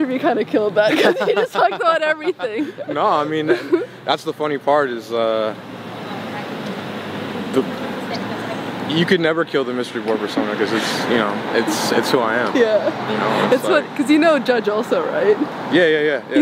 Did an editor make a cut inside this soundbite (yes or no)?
no